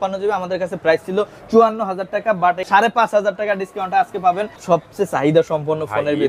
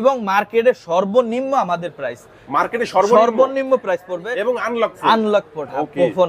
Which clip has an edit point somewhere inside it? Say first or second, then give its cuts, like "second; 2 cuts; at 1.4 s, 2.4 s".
first; 2 cuts; at 2.7 s, 4.5 s